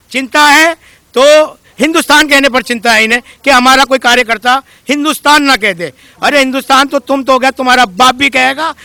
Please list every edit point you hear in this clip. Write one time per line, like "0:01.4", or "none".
none